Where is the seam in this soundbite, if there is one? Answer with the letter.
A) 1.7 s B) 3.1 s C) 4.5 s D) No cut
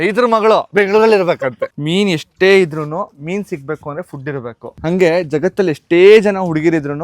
A